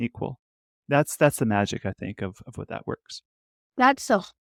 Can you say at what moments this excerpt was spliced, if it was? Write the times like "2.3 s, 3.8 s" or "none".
none